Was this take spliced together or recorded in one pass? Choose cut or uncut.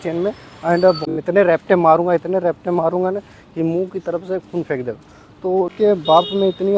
cut